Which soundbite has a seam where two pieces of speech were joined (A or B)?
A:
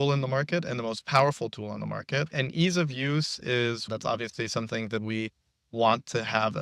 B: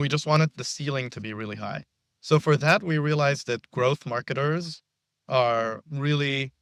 A